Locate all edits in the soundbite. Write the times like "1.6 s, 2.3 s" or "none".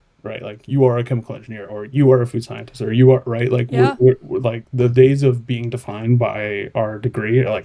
none